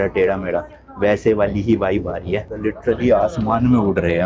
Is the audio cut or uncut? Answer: cut